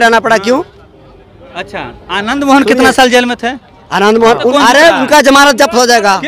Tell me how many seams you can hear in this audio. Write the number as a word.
one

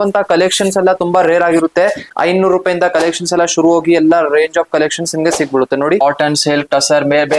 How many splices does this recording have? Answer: two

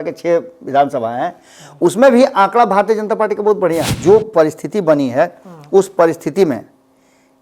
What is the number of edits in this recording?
one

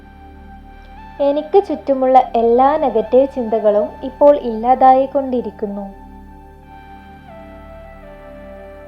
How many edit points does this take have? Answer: two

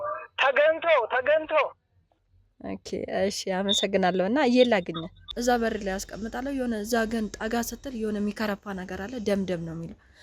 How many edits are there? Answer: one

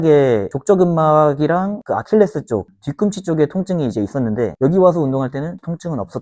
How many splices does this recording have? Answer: one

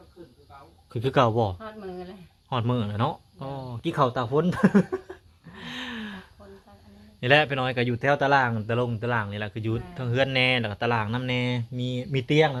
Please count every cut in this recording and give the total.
zero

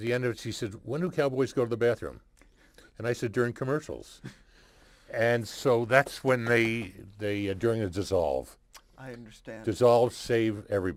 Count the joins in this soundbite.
zero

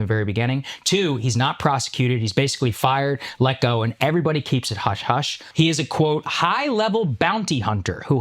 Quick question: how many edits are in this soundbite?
one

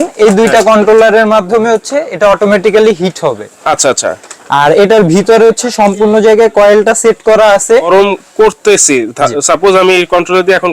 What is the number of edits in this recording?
one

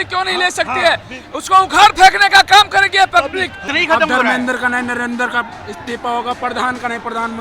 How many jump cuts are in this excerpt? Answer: one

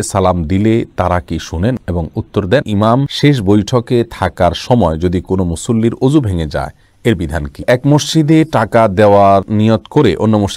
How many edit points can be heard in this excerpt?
two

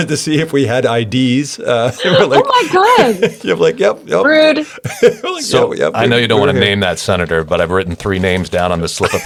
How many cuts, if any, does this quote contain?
zero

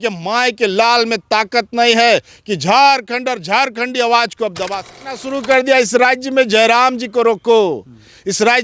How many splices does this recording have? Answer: one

